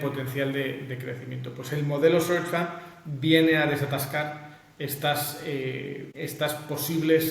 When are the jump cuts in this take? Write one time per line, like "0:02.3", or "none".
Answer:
0:06.1